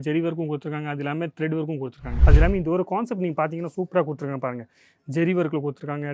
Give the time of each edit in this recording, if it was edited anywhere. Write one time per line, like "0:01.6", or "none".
0:02.1